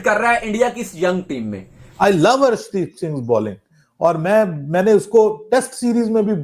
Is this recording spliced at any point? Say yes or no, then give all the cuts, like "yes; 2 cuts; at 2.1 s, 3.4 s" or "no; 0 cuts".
yes; 1 cut; at 1.9 s